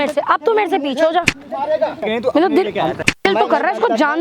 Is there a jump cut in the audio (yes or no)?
yes